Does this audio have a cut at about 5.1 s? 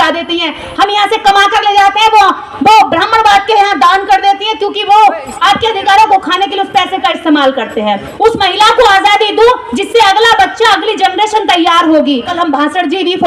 no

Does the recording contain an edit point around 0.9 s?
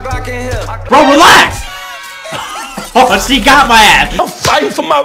yes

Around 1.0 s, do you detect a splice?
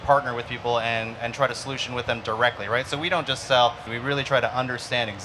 no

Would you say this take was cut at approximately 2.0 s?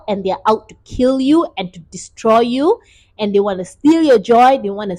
no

